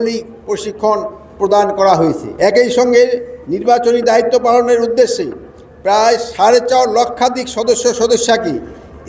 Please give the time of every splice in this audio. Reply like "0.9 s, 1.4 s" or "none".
2.3 s